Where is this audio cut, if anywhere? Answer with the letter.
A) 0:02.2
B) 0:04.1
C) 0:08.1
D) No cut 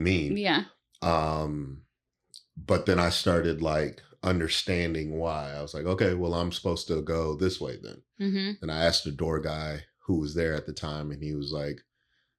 D